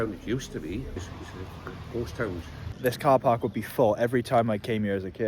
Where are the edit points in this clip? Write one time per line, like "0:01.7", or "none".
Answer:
0:01.0
0:02.7